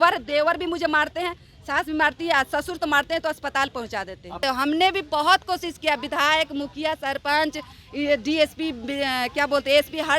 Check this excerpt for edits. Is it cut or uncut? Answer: cut